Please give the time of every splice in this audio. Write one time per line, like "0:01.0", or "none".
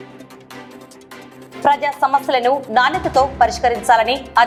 none